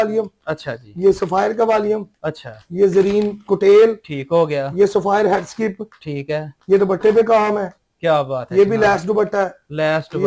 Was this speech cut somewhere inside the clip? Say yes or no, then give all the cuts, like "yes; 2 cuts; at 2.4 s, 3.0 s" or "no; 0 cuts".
no; 0 cuts